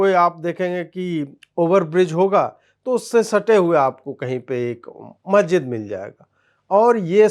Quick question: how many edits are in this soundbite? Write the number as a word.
zero